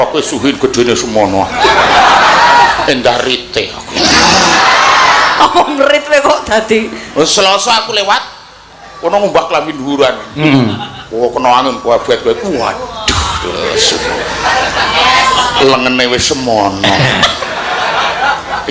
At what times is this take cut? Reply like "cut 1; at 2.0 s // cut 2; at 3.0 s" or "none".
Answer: none